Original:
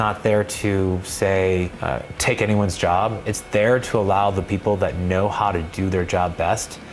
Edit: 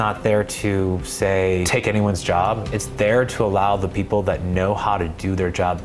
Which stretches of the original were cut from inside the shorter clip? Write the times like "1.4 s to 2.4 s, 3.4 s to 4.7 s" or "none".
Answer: 1.7 s to 2.2 s